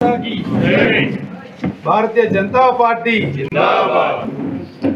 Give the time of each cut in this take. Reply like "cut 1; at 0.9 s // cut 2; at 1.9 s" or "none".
cut 1; at 3.5 s // cut 2; at 4.2 s

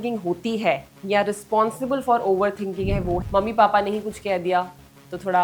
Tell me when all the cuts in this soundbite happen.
cut 1; at 3.2 s

